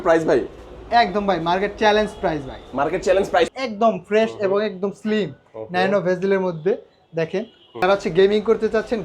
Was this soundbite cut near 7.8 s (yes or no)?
yes